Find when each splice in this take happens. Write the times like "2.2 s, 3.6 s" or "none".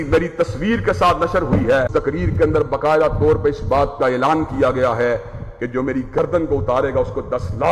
1.9 s